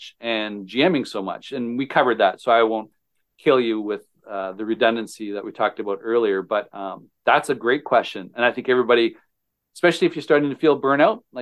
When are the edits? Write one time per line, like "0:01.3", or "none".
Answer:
none